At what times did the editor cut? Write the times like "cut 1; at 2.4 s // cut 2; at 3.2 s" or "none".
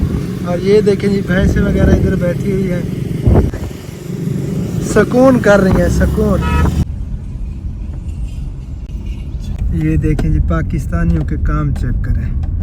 cut 1; at 3.5 s // cut 2; at 6.8 s // cut 3; at 9.6 s